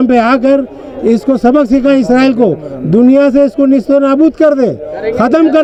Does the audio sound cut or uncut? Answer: uncut